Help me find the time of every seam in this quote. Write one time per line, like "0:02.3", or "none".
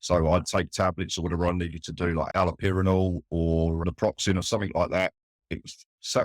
0:02.3
0:03.8